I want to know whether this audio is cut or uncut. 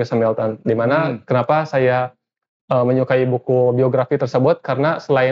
uncut